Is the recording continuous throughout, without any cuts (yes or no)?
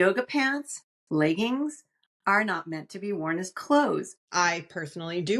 no